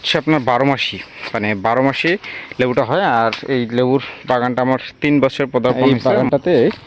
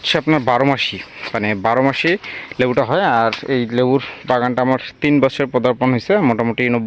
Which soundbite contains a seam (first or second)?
first